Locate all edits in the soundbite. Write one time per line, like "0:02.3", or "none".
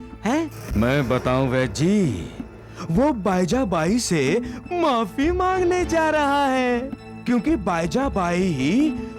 none